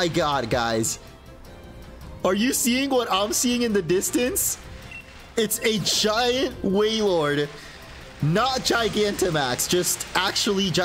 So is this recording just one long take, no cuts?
yes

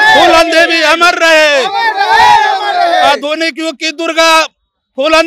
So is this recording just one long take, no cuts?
yes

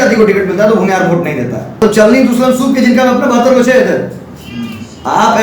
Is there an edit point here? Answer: yes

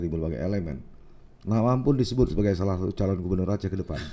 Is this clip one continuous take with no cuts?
yes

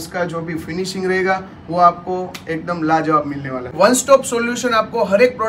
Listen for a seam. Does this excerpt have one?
yes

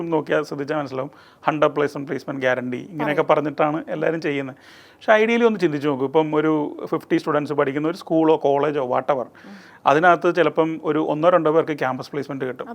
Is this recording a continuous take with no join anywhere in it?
yes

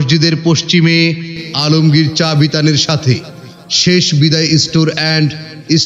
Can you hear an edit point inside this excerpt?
no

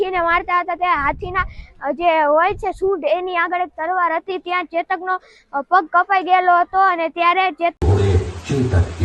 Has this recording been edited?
yes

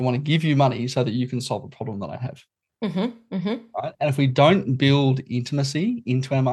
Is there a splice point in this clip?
no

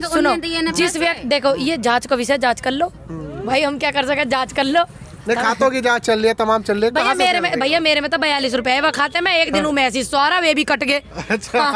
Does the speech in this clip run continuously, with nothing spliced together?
yes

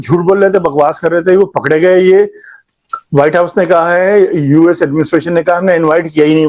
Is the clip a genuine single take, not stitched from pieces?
yes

